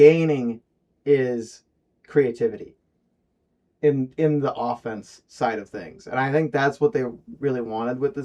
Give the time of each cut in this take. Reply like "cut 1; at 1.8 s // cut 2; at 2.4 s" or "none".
none